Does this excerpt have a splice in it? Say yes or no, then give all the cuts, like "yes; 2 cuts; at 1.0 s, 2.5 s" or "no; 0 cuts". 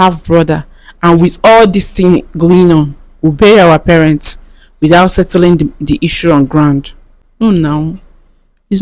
no; 0 cuts